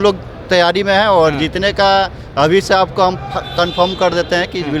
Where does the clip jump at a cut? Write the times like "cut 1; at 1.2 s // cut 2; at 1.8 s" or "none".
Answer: none